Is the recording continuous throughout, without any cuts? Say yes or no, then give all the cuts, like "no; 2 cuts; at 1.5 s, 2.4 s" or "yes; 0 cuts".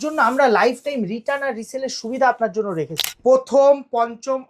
no; 1 cut; at 3.0 s